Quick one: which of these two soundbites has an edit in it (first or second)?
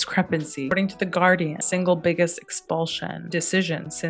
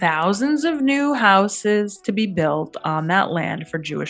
first